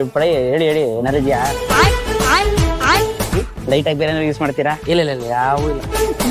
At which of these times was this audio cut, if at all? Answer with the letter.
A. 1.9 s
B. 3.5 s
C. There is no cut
C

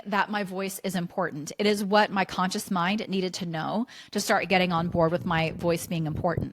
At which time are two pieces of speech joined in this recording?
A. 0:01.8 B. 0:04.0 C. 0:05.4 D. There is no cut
D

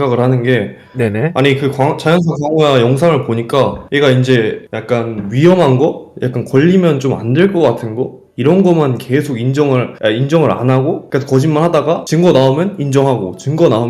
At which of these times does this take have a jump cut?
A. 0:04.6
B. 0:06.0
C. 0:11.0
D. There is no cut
D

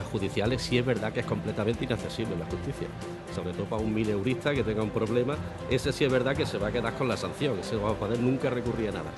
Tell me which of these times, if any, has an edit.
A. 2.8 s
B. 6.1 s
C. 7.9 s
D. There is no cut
B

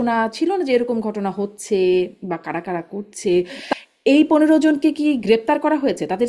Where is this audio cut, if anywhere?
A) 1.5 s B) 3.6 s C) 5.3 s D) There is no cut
B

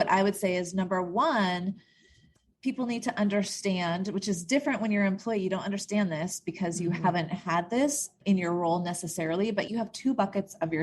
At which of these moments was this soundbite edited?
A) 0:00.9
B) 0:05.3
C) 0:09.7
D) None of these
C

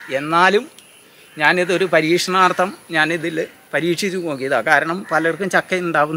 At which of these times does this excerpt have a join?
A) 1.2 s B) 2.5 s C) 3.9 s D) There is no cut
D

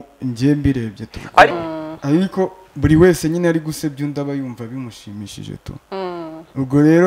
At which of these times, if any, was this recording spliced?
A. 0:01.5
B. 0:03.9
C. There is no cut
A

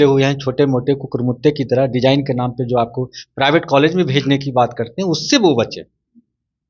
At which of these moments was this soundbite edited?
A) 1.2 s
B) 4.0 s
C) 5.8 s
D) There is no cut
D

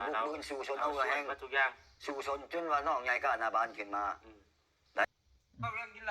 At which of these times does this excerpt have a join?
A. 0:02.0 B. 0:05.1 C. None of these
B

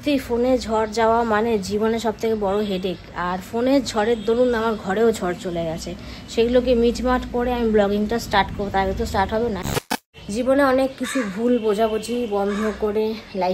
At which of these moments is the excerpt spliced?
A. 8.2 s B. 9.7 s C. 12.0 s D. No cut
B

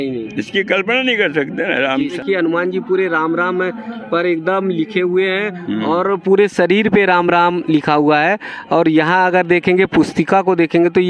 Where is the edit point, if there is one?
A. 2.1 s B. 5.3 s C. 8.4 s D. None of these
A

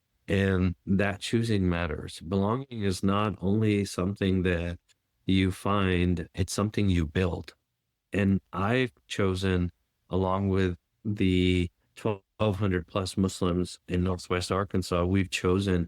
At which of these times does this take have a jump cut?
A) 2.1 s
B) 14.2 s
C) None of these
C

